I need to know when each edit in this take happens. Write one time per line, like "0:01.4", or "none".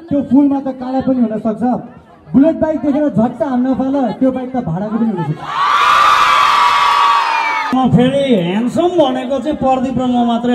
0:07.7

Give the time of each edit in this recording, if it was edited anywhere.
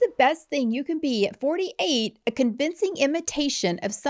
none

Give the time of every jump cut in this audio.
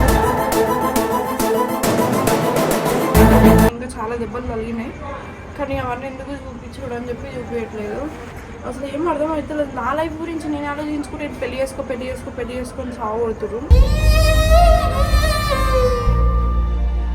0:03.8

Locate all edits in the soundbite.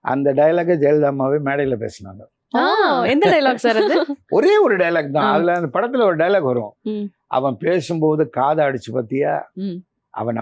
none

